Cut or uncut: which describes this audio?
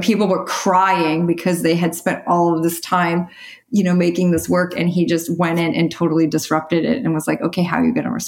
uncut